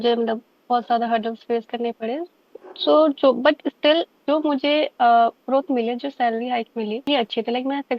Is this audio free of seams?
no; 1 cut; at 7.1 s

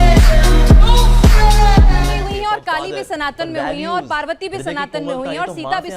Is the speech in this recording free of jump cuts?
no; 1 cut; at 2.1 s

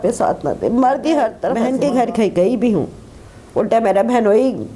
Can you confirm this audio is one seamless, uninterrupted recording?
no; 1 cut; at 1.6 s

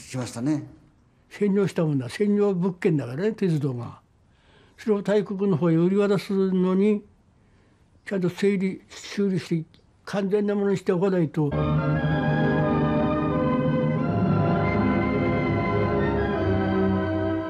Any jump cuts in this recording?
no; 0 cuts

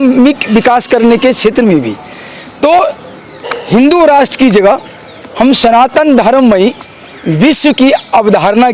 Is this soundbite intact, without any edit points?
yes; 0 cuts

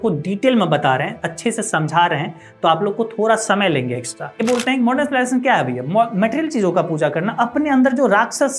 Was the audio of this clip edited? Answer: yes; 1 cut; at 4.4 s

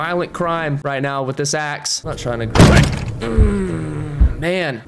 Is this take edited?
yes; 1 cut; at 1.9 s

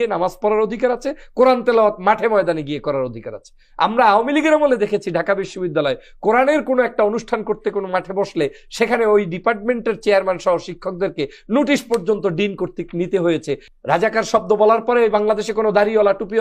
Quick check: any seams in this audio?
yes; 1 cut; at 13.6 s

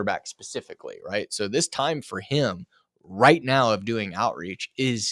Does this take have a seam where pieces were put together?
no; 0 cuts

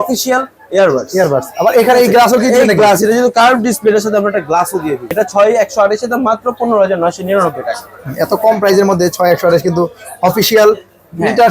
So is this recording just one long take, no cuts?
no; 1 cut; at 5.1 s

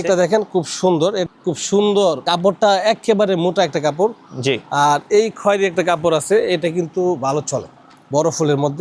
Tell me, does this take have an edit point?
yes; 1 cut; at 1.2 s

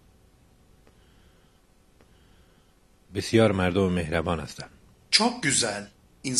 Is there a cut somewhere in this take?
no; 0 cuts

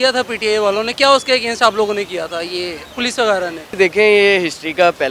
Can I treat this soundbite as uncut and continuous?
no; 2 cuts; at 2.8 s, 3.7 s

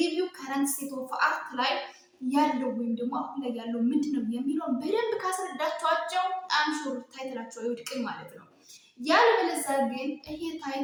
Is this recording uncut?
yes; 0 cuts

